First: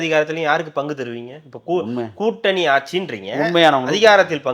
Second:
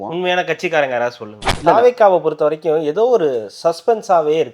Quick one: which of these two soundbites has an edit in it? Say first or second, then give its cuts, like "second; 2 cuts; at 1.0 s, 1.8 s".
second; 1 cut; at 1.5 s